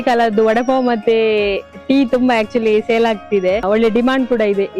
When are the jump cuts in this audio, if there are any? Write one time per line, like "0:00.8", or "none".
0:03.6